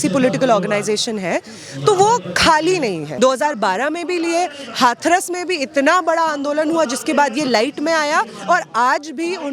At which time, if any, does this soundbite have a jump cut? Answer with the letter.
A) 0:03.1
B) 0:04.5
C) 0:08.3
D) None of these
A